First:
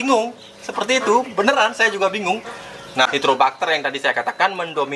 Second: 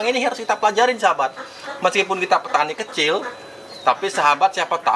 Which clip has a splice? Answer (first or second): first